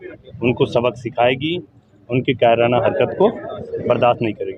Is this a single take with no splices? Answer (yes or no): yes